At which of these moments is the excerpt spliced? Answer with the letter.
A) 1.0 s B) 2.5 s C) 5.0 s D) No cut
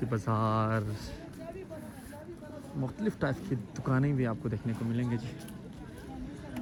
D